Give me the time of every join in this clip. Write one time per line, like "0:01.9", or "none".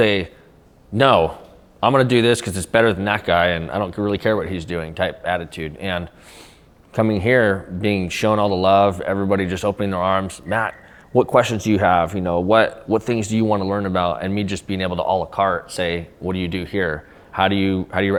none